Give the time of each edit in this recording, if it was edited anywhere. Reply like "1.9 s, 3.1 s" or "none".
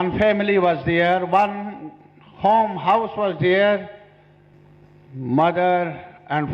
4.5 s